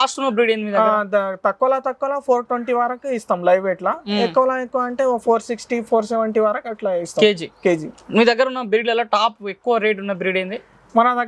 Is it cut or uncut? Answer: uncut